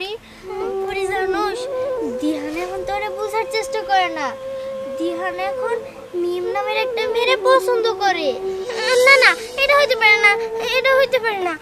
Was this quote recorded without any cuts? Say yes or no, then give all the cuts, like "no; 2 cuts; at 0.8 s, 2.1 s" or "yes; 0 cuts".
yes; 0 cuts